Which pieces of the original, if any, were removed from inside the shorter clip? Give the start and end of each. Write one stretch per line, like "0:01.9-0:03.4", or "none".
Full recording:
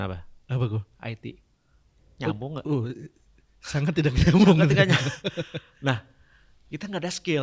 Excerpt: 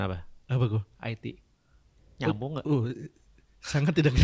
none